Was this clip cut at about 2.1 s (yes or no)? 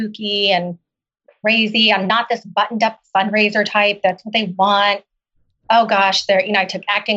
yes